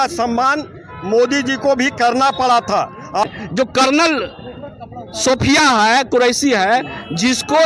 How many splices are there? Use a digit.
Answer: 1